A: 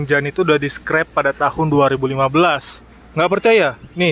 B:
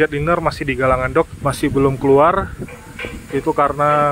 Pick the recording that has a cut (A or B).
B